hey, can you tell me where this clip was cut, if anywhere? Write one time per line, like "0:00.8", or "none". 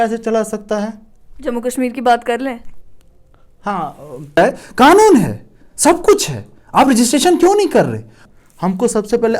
0:04.4
0:08.1